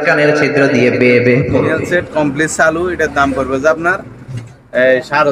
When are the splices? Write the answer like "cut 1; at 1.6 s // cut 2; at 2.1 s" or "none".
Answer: cut 1; at 1.8 s